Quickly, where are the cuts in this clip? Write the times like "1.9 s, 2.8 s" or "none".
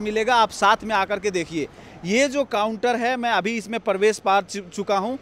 none